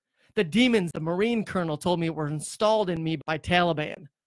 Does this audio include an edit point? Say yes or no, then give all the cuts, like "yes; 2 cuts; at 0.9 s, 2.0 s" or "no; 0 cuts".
yes; 2 cuts; at 0.9 s, 3.2 s